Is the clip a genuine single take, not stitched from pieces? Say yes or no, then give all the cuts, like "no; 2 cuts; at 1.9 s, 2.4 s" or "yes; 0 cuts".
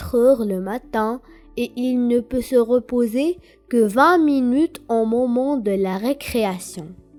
yes; 0 cuts